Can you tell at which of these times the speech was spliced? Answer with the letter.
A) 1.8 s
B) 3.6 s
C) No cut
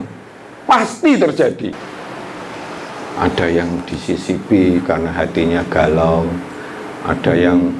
A